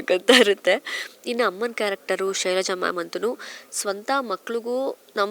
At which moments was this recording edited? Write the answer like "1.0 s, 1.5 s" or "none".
none

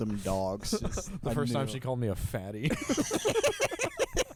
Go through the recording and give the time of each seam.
none

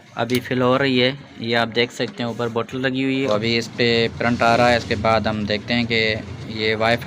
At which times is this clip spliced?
3.2 s

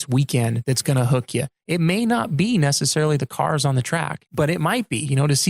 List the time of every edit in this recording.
4.2 s

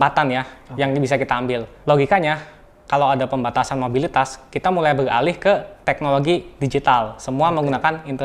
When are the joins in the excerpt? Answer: 1.7 s, 5.7 s

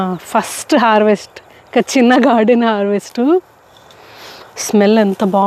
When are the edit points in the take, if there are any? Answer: none

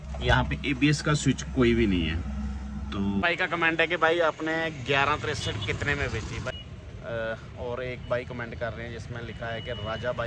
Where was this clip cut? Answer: 3.2 s, 6.5 s

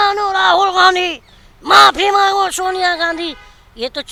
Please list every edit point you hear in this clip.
none

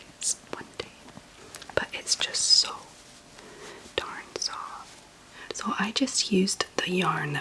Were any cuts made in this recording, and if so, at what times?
5.6 s

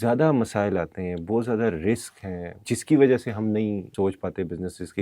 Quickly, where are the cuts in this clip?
2.5 s, 3.9 s

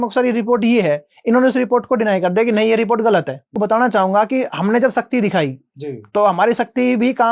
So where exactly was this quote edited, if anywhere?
3.5 s

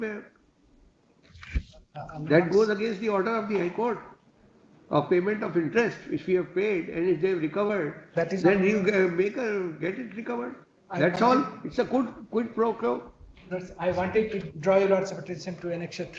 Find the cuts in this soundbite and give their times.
none

